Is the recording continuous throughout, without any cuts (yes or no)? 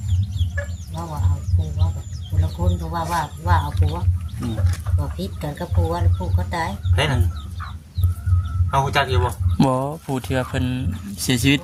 yes